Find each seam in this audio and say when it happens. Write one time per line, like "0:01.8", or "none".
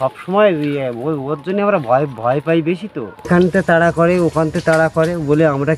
0:03.3

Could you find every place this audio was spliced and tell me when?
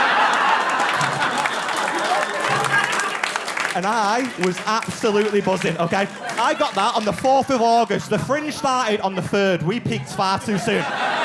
0:01.0
0:02.5

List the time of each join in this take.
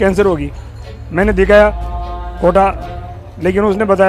none

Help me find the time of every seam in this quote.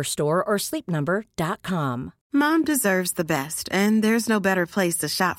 0:02.1

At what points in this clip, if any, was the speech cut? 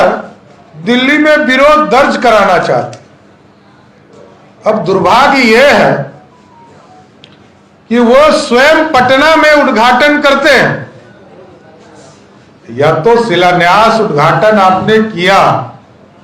none

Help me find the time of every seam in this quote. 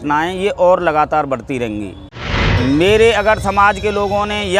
0:02.5

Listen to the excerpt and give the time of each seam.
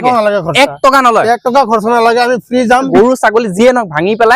0:02.9

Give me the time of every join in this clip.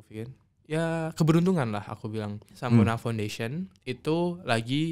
0:02.4

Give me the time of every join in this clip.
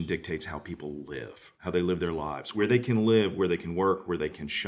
0:01.6
0:02.5

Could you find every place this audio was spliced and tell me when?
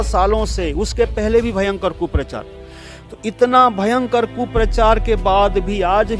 none

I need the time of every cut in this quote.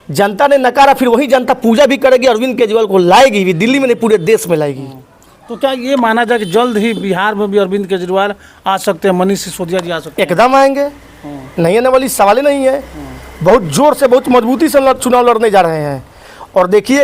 none

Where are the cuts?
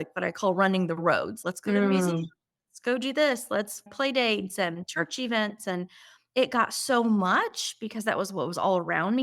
none

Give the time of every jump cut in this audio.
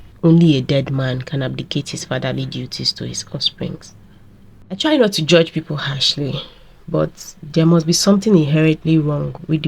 0:04.8

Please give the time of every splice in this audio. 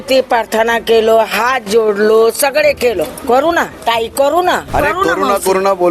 0:03.7
0:04.7

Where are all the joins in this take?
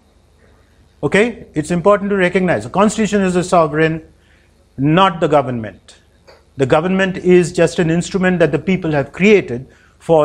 none

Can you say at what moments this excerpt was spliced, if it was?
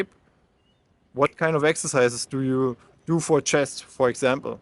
none

